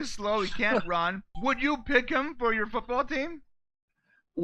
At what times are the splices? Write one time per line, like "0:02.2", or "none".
0:01.3